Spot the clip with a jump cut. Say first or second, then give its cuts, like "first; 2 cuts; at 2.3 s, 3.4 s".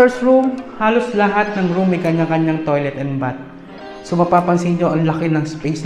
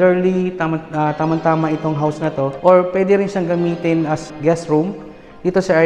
second; 2 cuts; at 2.5 s, 4.3 s